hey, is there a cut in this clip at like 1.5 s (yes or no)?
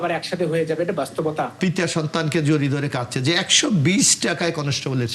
yes